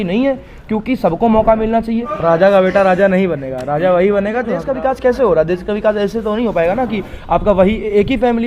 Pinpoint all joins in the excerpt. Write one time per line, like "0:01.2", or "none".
0:02.1
0:04.6

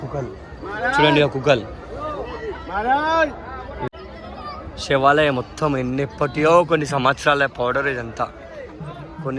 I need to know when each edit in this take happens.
0:03.9

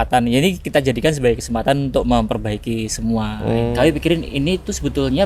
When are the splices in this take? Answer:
0:03.7

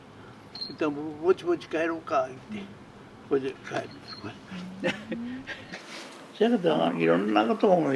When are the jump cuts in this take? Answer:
0:05.7
0:06.9

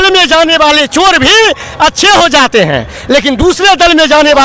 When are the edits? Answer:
none

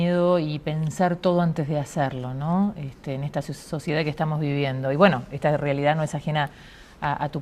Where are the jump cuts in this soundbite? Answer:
0:03.3

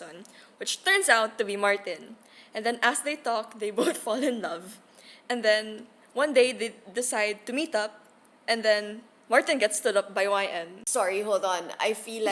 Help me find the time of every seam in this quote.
0:10.7

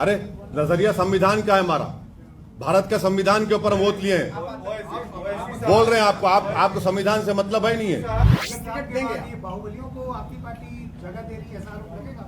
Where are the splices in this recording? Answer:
0:08.3

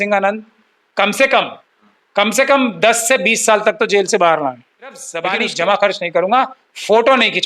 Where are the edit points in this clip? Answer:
0:05.1

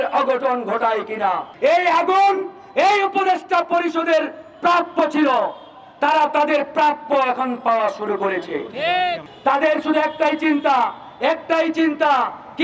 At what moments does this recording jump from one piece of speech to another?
0:01.5
0:09.3

